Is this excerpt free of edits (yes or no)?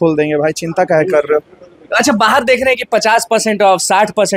yes